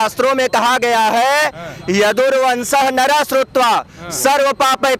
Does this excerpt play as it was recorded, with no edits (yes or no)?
yes